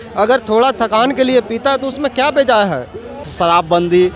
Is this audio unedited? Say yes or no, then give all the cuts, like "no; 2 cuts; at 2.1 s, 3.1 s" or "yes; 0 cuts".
no; 1 cut; at 3.2 s